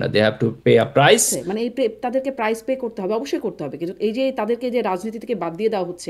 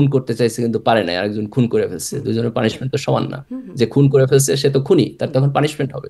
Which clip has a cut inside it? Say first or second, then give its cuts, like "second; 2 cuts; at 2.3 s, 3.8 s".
first; 1 cut; at 1.4 s